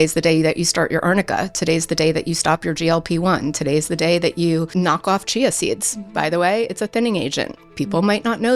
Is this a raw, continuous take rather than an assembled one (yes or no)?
no